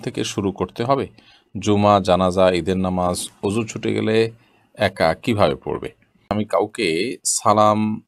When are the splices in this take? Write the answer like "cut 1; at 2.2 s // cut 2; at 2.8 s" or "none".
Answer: cut 1; at 6.3 s